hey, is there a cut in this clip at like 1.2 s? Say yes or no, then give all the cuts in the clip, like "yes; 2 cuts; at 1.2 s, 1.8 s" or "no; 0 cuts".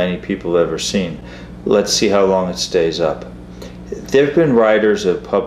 no; 0 cuts